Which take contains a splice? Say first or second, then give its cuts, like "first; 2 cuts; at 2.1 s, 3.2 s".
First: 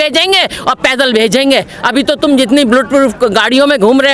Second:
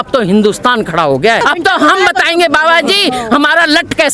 second; 1 cut; at 1.4 s